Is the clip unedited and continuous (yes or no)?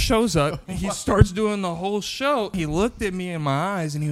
no